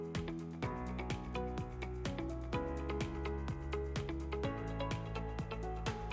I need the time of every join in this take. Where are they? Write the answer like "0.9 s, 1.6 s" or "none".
none